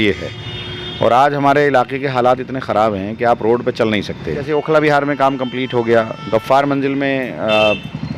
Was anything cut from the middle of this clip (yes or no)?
yes